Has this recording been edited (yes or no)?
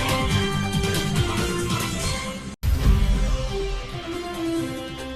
yes